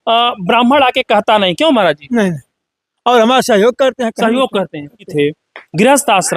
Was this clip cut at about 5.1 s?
yes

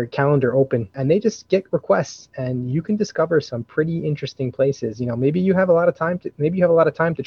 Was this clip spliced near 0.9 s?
yes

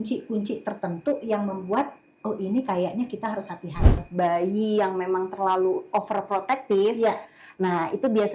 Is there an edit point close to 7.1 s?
no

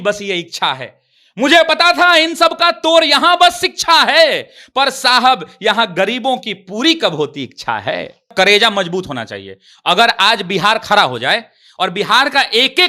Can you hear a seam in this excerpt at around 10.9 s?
no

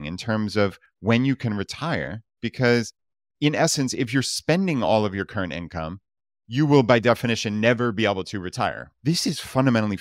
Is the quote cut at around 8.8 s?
yes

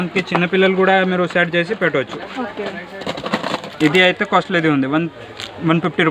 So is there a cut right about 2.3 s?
no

